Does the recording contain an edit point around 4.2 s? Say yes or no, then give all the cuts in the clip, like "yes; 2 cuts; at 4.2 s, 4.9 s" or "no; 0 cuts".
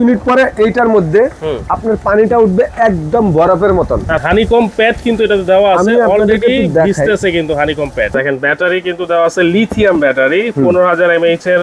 yes; 2 cuts; at 4.2 s, 8.1 s